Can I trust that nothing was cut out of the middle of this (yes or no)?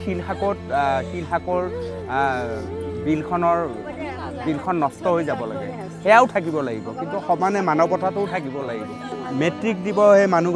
no